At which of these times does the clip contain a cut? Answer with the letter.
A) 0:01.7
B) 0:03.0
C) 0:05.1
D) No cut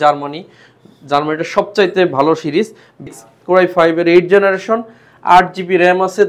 B